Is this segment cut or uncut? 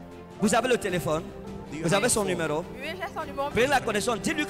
cut